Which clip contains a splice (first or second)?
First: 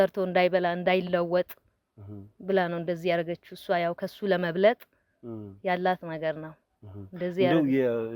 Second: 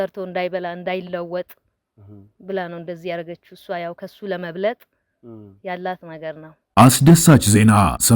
second